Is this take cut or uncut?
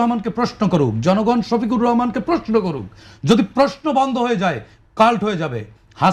uncut